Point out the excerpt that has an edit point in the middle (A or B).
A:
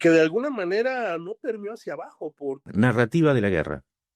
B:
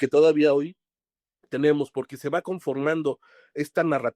A